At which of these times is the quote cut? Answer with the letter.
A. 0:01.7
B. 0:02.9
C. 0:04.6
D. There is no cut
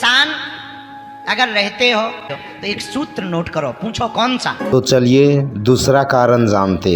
C